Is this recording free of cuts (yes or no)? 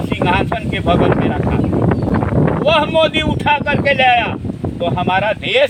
yes